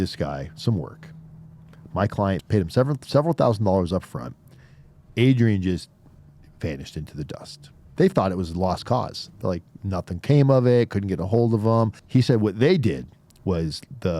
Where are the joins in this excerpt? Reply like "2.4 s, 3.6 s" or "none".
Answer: 2.4 s, 12.0 s